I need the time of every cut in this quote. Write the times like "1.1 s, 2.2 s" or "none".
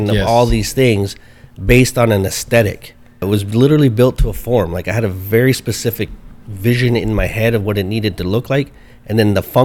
3.2 s

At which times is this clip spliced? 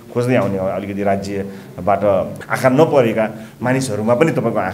2.4 s

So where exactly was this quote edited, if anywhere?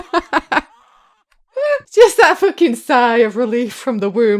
1.9 s

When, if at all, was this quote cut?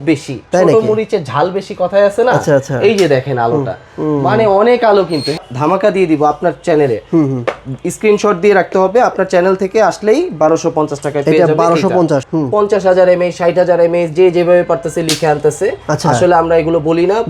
5.4 s, 12.3 s

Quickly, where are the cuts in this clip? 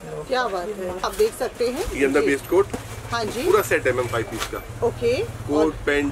1.1 s

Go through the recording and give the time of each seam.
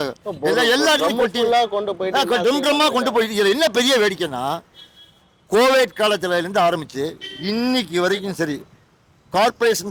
none

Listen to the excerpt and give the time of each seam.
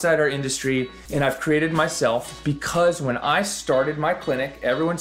1.0 s

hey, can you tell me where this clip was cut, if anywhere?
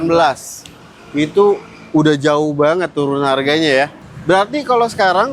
4.1 s

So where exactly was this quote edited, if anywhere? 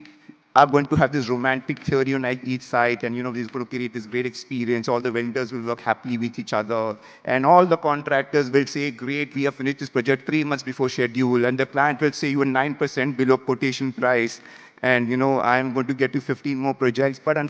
none

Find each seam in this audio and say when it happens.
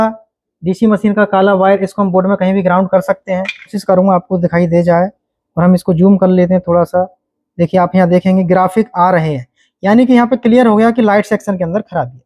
3.8 s

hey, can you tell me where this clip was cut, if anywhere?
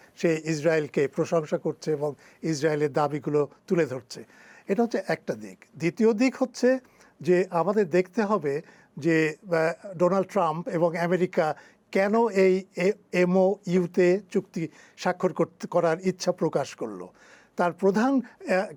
none

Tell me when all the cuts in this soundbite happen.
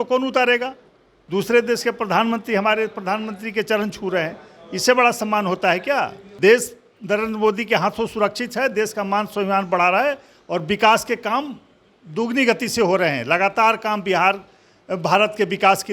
1.1 s, 6.2 s

